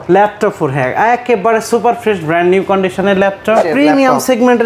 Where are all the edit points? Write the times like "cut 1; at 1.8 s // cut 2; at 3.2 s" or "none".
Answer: cut 1; at 3.7 s